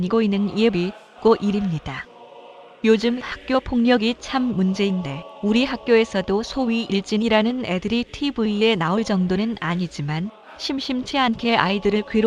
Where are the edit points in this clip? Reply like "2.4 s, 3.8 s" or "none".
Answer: none